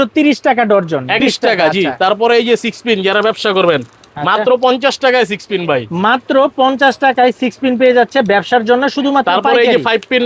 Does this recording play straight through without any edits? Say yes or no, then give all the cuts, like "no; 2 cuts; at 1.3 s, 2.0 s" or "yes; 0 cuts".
yes; 0 cuts